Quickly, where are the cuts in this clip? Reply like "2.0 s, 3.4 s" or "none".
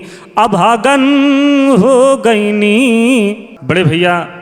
3.5 s